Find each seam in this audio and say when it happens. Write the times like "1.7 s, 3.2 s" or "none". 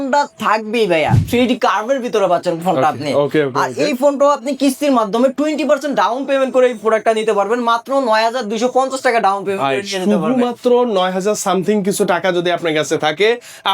1.2 s